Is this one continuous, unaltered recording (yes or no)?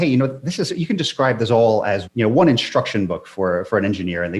yes